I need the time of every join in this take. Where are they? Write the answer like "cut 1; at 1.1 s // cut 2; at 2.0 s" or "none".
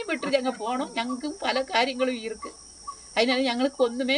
none

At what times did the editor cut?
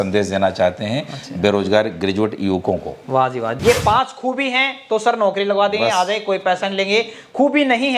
cut 1; at 3.5 s

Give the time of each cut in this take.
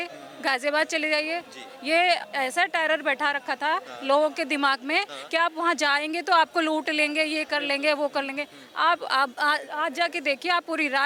none

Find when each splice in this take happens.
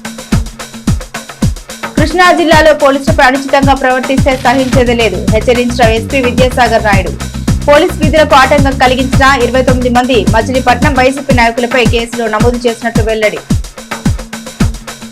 cut 1; at 1.9 s

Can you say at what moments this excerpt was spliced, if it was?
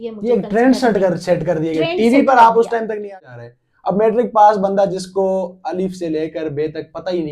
cut 1; at 3.0 s

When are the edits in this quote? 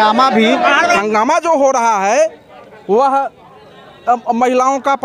cut 1; at 1.0 s

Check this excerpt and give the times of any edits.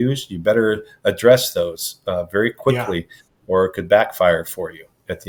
none

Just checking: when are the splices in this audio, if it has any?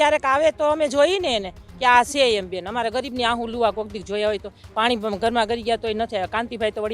none

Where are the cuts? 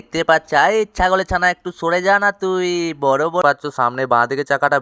cut 1; at 3.4 s

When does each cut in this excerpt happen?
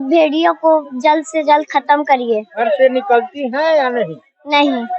cut 1; at 2.5 s

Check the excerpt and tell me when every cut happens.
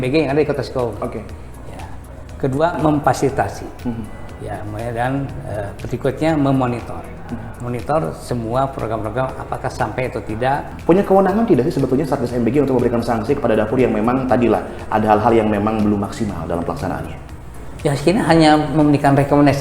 cut 1; at 10.7 s

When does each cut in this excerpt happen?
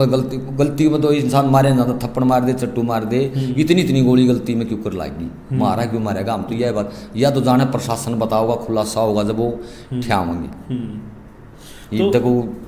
none

